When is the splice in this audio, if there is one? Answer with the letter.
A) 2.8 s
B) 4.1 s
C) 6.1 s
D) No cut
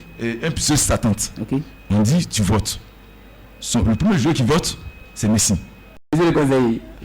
C